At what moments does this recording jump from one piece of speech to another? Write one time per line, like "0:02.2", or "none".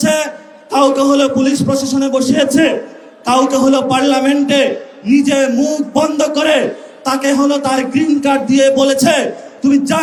none

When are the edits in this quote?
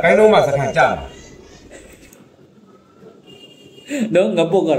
none

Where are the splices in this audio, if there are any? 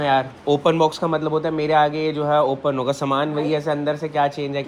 none

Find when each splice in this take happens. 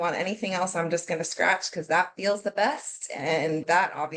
none

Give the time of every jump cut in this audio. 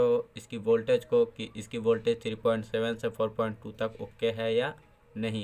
none

